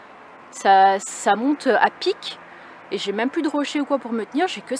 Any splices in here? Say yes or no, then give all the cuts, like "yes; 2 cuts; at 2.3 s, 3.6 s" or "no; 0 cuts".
no; 0 cuts